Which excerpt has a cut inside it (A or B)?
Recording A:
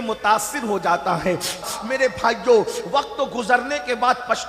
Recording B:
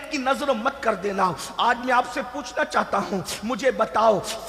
A